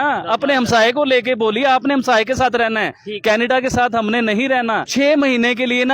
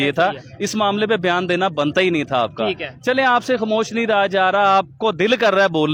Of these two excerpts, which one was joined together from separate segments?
first; 1 cut; at 4.9 s

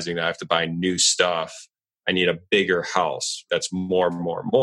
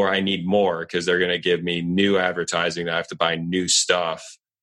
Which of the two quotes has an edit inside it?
first; 1 cut; at 3.5 s

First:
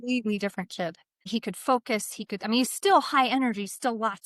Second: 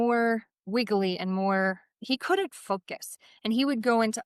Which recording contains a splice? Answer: first; 1 cut; at 1.1 s

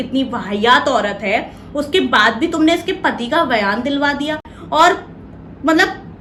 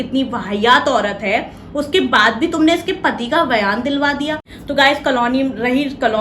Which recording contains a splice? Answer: second; 1 cut; at 4.5 s

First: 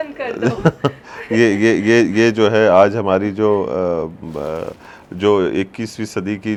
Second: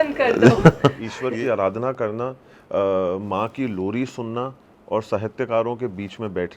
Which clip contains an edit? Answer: second; 1 cut; at 1.1 s

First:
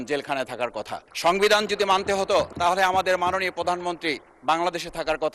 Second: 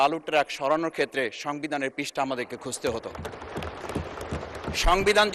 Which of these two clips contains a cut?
first; 2 cuts; at 1.0 s, 2.5 s

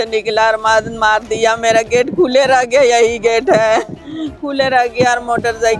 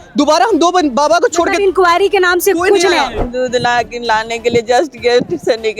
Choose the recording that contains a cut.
second; 1 cut; at 3.2 s

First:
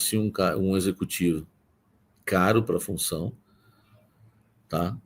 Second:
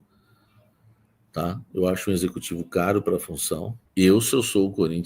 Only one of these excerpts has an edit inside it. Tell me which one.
second; 1 cut; at 3.8 s

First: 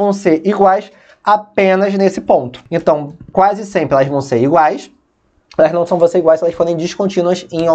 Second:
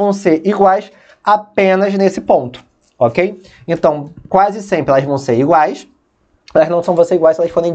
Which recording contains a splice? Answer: first; 1 cut; at 2.6 s

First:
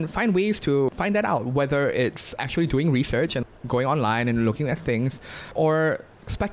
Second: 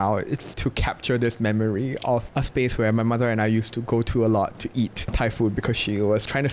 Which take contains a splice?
first; 3 cuts; at 0.9 s, 2.4 s, 3.4 s

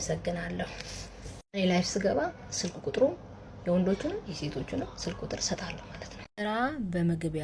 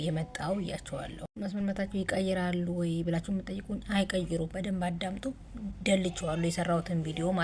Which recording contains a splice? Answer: first; 1 cut; at 6.3 s

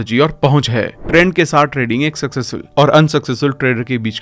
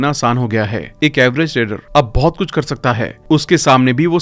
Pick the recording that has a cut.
first; 1 cut; at 1.0 s

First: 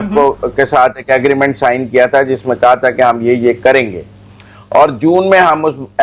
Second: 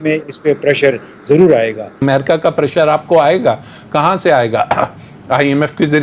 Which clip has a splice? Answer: second; 1 cut; at 2.0 s

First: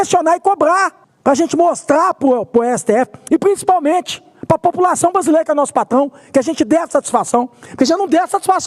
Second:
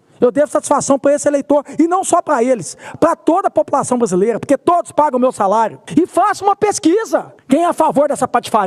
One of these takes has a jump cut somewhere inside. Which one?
first; 1 cut; at 1.0 s

